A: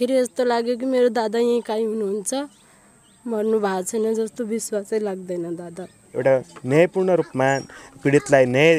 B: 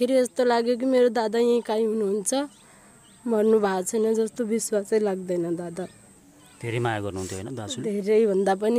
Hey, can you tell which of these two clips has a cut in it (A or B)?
A